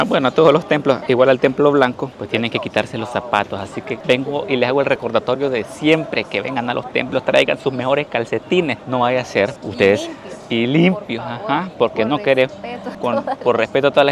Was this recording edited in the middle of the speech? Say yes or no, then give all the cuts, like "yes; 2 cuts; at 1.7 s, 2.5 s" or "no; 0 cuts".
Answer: no; 0 cuts